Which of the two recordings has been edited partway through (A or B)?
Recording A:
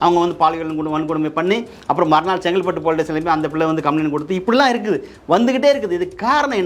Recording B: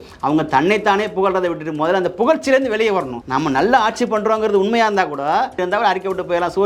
B